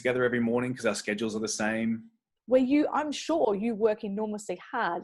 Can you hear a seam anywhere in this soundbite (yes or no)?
yes